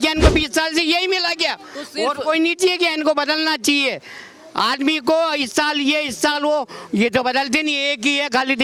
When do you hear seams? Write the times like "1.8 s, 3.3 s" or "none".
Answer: none